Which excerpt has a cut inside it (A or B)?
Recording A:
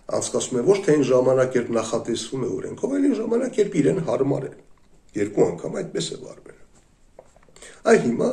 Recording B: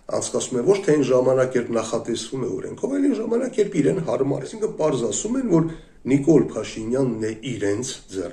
B